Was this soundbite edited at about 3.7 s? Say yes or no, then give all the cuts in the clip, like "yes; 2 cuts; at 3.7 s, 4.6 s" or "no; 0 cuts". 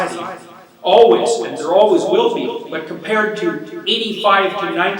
yes; 1 cut; at 3.7 s